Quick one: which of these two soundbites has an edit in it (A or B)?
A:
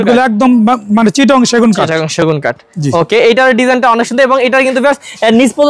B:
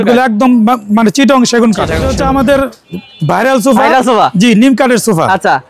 B